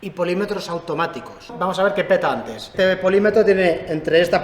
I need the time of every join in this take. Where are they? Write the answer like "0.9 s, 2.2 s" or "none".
1.5 s, 2.7 s